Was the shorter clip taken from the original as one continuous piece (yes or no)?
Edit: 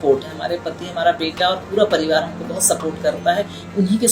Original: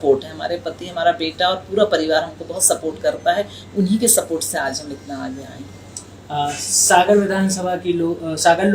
yes